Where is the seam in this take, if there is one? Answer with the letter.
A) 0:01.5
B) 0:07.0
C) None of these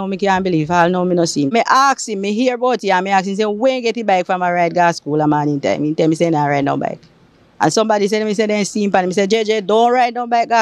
A